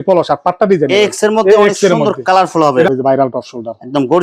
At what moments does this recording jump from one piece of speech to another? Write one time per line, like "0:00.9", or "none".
0:02.9